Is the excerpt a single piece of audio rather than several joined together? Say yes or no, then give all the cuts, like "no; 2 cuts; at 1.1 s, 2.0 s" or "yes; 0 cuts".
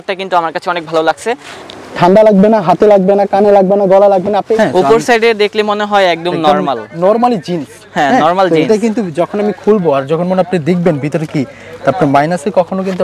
no; 2 cuts; at 1.5 s, 4.6 s